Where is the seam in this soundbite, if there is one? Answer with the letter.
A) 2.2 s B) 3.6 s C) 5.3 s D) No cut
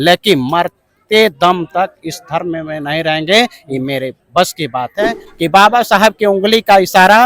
C